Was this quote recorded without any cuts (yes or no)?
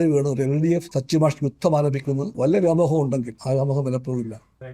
no